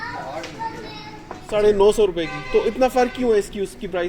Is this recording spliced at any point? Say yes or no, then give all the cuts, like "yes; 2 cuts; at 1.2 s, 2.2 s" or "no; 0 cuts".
yes; 1 cut; at 1.5 s